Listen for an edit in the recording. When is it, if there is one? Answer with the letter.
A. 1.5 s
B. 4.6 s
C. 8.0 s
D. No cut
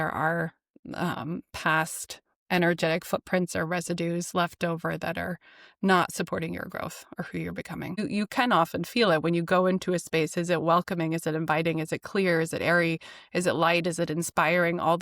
C